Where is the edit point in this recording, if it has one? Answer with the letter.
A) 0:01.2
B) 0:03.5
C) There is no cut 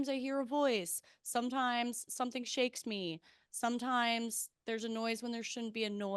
C